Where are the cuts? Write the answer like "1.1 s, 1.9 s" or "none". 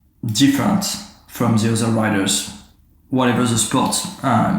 none